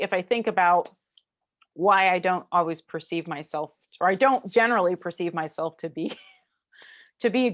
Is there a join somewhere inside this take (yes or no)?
no